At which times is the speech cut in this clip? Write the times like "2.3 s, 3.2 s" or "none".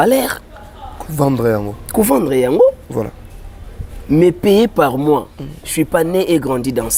none